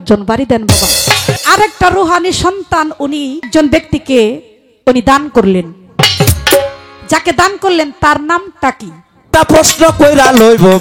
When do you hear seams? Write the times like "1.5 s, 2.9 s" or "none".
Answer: 1.4 s, 3.5 s, 9.2 s